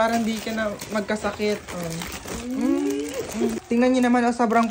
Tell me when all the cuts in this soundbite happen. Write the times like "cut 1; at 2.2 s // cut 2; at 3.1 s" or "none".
cut 1; at 3.6 s

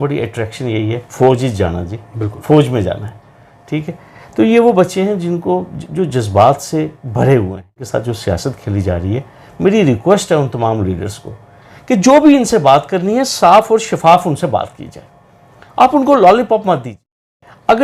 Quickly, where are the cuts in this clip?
cut 1; at 7.8 s

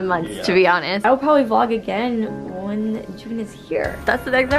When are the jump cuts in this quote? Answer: cut 1; at 1.0 s

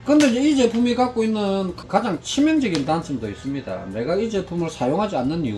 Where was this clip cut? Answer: none

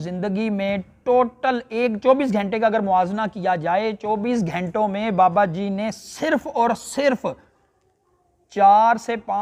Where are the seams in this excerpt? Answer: none

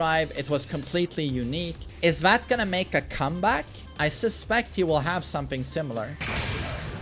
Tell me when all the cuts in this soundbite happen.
cut 1; at 1.8 s // cut 2; at 3.8 s

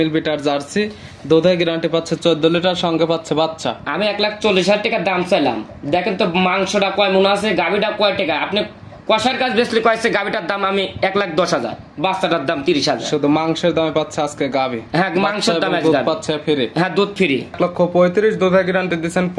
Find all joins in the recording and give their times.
cut 1; at 17.5 s

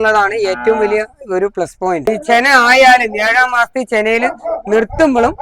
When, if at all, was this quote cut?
cut 1; at 2.1 s

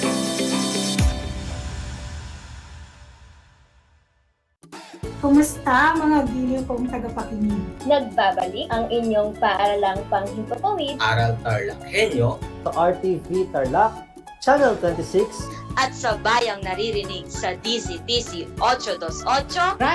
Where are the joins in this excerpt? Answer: cut 1; at 4.5 s

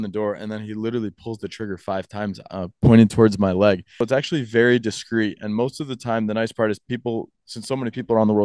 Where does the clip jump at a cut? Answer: cut 1; at 4.0 s

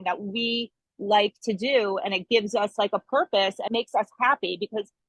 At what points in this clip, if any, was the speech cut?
cut 1; at 3.7 s

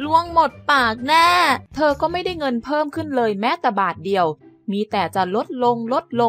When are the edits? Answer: cut 1; at 1.7 s

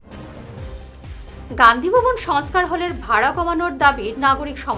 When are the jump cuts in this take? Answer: cut 1; at 1.0 s

